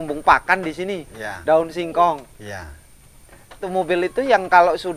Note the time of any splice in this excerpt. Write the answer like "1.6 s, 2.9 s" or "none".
3.7 s